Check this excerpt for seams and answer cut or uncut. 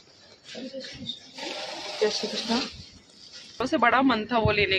cut